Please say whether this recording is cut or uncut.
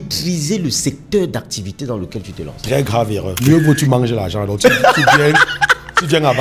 cut